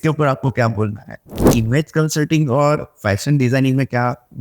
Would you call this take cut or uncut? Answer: cut